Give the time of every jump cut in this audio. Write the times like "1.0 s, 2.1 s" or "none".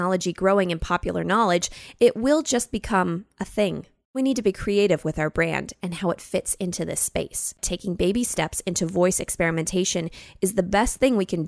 4.2 s, 7.7 s

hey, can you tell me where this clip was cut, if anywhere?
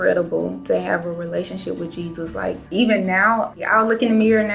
2.6 s, 3.6 s

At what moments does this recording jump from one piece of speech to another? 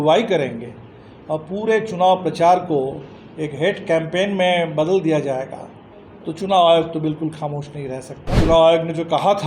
8.4 s

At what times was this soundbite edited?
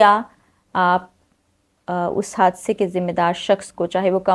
none

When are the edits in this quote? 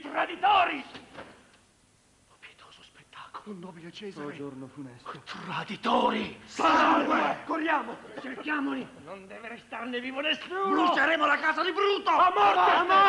1.9 s

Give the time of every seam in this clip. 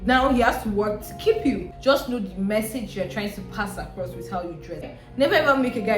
1.7 s, 4.9 s

